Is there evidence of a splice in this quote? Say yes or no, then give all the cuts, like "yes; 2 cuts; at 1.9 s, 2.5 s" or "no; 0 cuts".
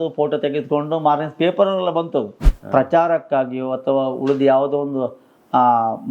yes; 1 cut; at 2.5 s